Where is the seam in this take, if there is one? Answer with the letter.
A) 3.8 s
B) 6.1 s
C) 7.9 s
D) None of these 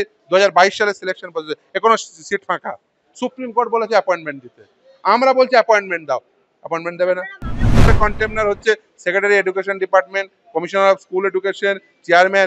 C